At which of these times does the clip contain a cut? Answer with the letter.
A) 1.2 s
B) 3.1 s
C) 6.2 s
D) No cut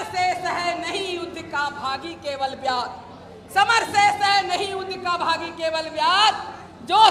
D